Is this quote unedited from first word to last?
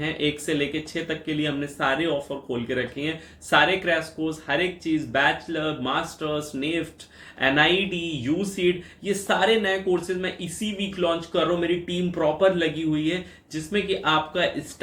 yes; 0 cuts

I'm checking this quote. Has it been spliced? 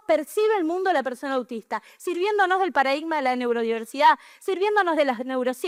no; 0 cuts

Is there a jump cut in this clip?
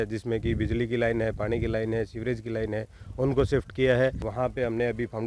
yes; 1 cut; at 4.2 s

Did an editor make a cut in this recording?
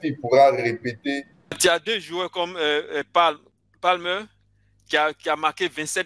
yes; 1 cut; at 1.6 s

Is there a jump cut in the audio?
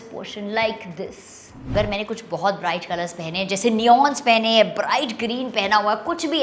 yes; 1 cut; at 1.7 s

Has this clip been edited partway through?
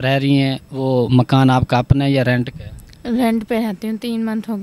no; 0 cuts

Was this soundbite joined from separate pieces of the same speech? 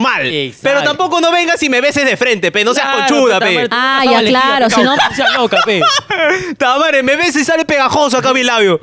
no; 0 cuts

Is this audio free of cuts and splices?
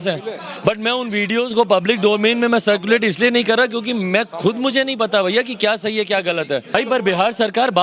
no; 1 cut; at 6.7 s

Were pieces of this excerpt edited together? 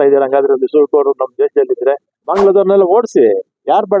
yes; 1 cut; at 2.1 s

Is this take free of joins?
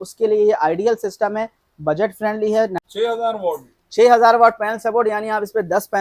no; 1 cut; at 2.8 s

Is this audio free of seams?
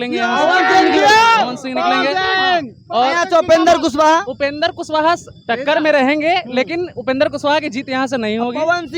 yes; 0 cuts

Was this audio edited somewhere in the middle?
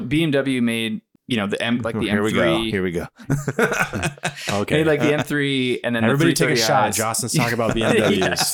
yes; 1 cut; at 1.1 s

